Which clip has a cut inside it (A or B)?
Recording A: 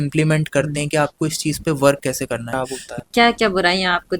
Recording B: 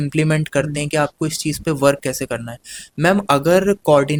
A